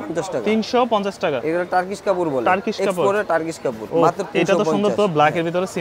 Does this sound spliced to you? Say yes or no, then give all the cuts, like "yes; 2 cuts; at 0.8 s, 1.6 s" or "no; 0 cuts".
yes; 2 cuts; at 1.4 s, 3.8 s